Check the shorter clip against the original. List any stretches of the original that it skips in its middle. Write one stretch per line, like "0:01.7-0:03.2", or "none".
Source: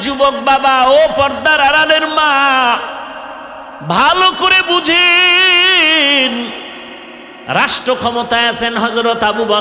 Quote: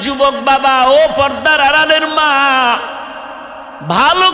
none